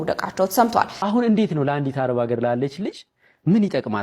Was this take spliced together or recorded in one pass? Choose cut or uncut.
cut